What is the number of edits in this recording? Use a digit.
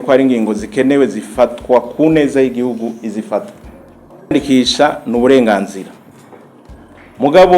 1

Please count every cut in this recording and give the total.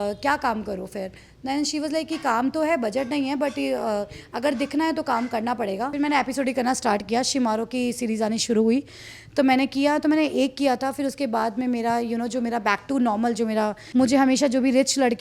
2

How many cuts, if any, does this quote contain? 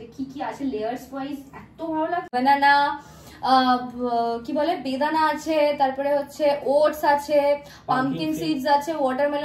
1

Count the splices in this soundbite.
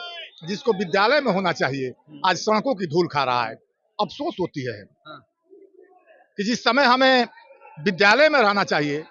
0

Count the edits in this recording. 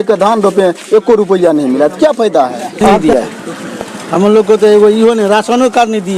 1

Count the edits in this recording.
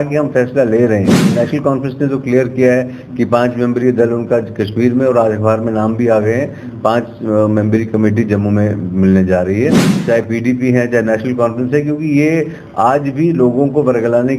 2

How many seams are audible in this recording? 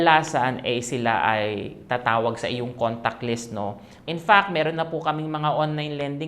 1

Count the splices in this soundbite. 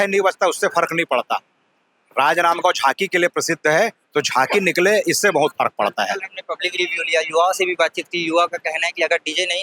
0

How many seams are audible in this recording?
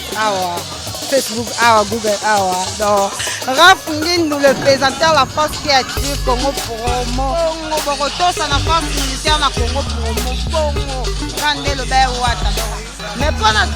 0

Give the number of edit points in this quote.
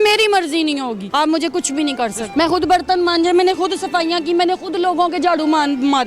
2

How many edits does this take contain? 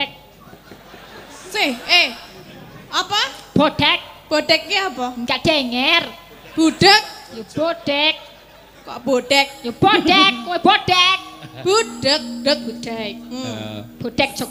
0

